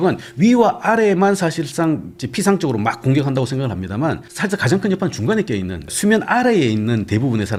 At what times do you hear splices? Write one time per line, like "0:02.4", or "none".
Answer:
none